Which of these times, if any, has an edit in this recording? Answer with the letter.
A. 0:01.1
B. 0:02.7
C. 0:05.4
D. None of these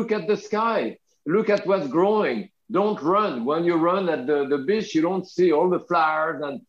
A